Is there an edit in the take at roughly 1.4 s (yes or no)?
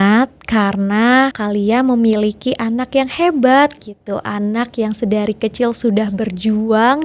yes